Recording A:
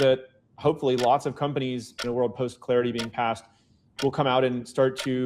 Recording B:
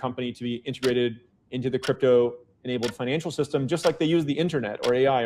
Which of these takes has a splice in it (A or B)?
A